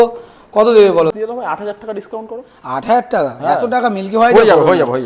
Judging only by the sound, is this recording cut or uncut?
cut